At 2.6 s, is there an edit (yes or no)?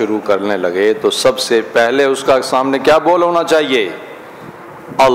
no